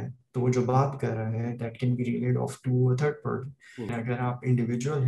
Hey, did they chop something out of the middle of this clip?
yes; 1 cut; at 3.9 s

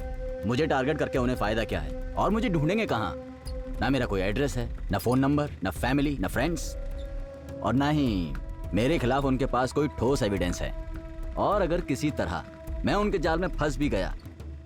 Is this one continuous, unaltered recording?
yes; 0 cuts

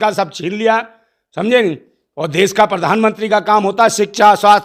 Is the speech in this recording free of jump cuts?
yes; 0 cuts

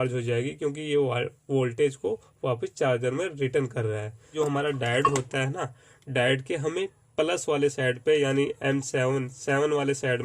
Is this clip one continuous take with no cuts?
no; 1 cut; at 4.3 s

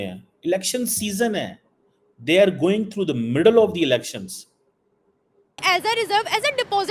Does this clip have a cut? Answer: yes; 1 cut; at 5.6 s

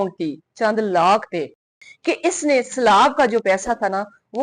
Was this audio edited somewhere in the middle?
yes; 1 cut; at 1.8 s

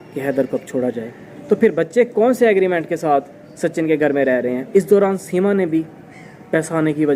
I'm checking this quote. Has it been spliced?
yes; 2 cuts; at 1.3 s, 4.6 s

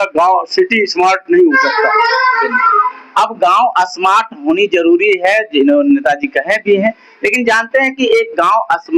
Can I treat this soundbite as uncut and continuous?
yes; 0 cuts

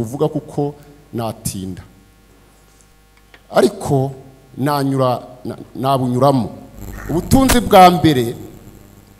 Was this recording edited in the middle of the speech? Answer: no; 0 cuts

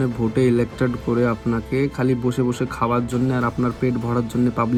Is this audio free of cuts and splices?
yes; 0 cuts

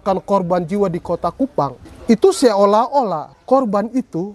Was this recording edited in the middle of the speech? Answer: yes; 2 cuts; at 1.9 s, 3.3 s

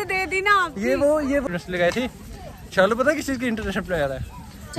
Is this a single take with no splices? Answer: no; 1 cut; at 1.4 s

